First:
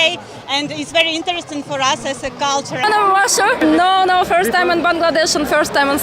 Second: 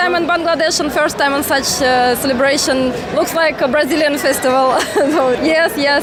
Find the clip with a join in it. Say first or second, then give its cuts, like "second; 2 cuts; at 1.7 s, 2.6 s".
first; 1 cut; at 2.8 s